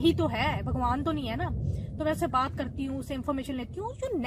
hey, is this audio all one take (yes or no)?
yes